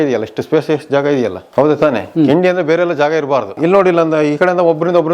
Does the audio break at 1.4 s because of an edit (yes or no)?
yes